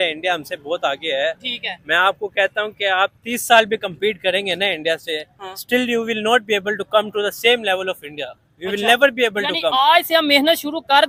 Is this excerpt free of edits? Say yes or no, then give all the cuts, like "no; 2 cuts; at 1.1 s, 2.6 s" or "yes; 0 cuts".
yes; 0 cuts